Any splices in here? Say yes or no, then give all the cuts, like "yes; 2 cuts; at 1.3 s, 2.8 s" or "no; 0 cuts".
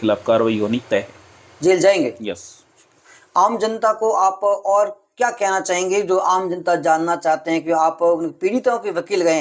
no; 0 cuts